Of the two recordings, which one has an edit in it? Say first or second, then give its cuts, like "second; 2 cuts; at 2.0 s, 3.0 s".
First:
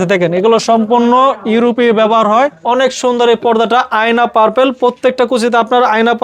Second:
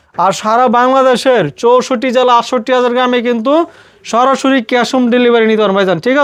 first; 1 cut; at 2.6 s